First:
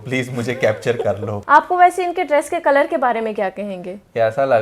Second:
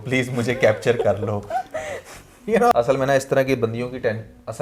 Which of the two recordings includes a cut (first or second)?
first